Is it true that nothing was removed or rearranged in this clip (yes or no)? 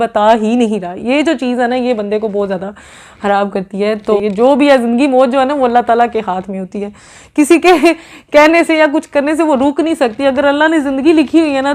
yes